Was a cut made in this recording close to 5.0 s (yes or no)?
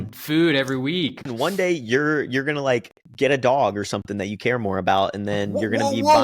no